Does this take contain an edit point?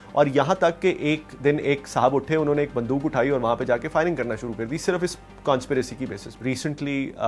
yes; 1 cut; at 6.3 s

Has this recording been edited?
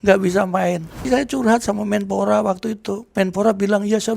yes; 2 cuts; at 1.1 s, 3.1 s

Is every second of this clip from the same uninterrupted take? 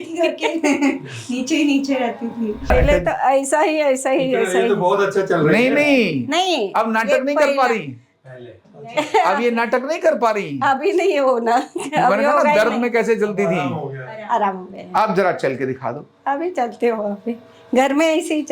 no; 1 cut; at 2.7 s

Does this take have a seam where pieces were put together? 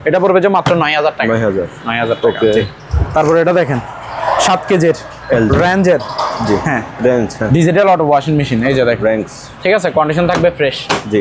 no; 0 cuts

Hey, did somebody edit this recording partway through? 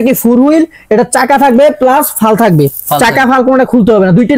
no; 0 cuts

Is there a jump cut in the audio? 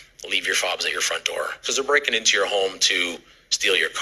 no; 0 cuts

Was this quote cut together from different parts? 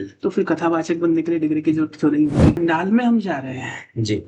yes; 1 cut; at 2.6 s

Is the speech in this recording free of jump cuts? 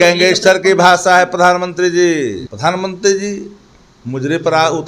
no; 1 cut; at 2.5 s

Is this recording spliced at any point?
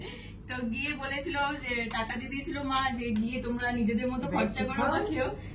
no; 0 cuts

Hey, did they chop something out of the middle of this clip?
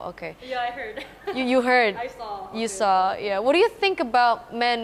no; 0 cuts

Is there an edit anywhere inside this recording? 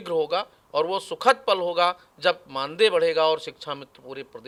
no; 0 cuts

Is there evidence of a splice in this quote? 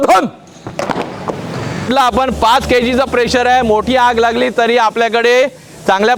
yes; 1 cut; at 1.9 s

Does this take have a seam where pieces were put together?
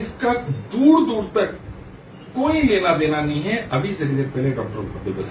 no; 0 cuts

